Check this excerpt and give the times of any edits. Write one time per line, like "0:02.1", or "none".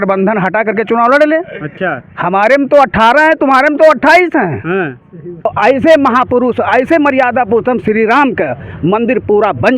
0:05.5